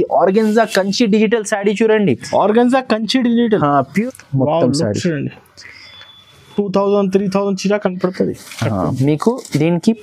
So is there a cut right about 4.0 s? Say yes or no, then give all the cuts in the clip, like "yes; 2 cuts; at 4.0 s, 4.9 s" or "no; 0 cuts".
yes; 1 cut; at 4.0 s